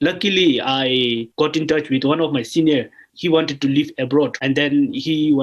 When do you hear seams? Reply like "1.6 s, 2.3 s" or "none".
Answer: 1.3 s, 3.0 s, 4.4 s